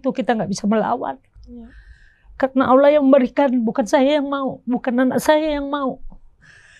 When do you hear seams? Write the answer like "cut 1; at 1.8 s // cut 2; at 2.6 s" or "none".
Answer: none